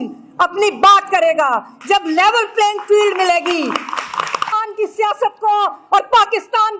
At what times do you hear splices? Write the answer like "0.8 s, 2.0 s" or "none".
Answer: 4.6 s